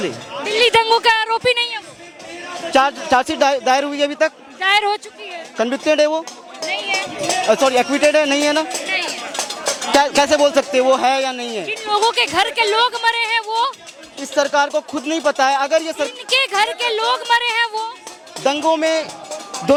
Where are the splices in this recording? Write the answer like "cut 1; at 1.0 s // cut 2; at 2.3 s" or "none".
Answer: none